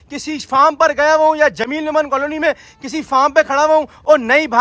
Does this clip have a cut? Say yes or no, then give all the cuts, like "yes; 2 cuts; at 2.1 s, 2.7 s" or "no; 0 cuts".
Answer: no; 0 cuts